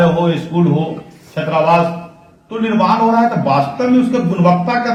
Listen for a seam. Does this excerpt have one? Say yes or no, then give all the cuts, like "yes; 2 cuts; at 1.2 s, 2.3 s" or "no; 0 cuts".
no; 0 cuts